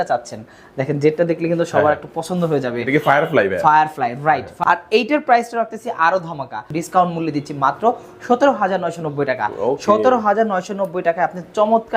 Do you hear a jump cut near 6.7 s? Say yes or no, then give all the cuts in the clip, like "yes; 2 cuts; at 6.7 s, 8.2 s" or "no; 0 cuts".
yes; 2 cuts; at 4.5 s, 6.7 s